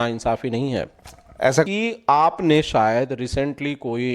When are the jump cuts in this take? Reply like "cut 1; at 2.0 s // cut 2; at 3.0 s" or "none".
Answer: cut 1; at 1.7 s